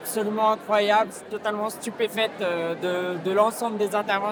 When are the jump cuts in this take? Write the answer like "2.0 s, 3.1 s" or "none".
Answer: none